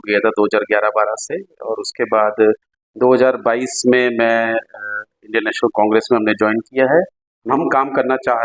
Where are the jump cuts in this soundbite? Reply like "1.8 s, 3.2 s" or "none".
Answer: 7.3 s

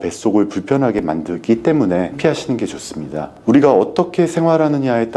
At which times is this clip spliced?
3.3 s

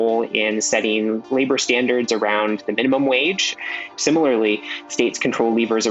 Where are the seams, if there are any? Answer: 3.8 s

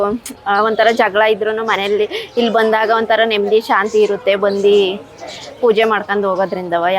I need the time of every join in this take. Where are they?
none

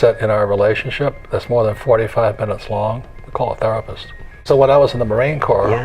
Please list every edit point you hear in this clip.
4.4 s

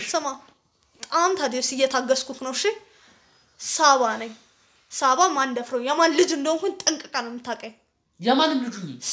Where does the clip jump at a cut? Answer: none

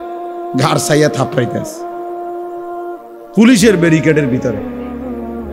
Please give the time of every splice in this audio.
1.8 s, 3.3 s, 4.8 s

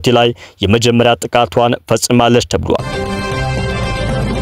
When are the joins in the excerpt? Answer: 2.9 s

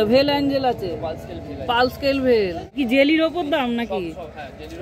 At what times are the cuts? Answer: 2.7 s

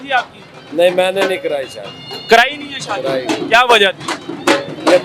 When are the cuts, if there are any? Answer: none

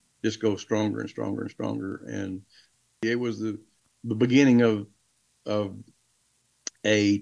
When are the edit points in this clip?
2.9 s

